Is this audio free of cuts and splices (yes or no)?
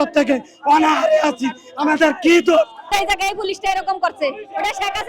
no